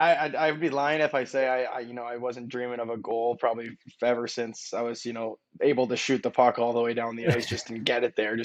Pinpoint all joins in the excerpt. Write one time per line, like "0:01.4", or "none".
none